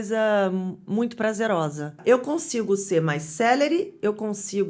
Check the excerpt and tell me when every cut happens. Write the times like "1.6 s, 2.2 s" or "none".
2.0 s